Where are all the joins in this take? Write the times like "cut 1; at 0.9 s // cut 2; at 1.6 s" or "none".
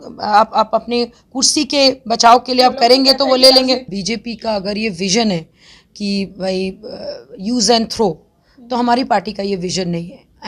cut 1; at 3.9 s